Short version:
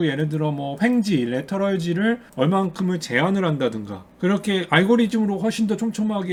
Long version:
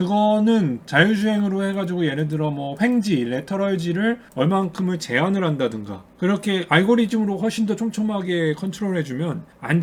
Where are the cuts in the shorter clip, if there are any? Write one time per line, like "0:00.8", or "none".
none